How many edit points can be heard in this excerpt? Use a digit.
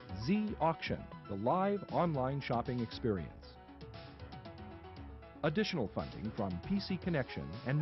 2